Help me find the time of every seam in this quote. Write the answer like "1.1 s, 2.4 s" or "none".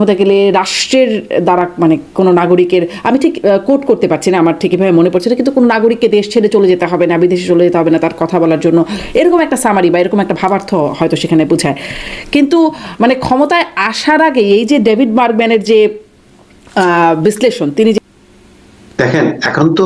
18.0 s